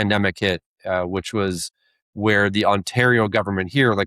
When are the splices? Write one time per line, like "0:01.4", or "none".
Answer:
none